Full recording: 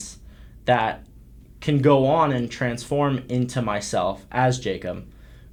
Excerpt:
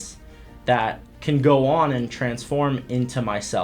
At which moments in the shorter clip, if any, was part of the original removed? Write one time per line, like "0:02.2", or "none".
0:01.1